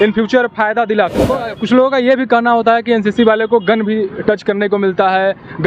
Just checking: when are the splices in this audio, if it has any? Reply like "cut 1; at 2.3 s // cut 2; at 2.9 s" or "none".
cut 1; at 1.3 s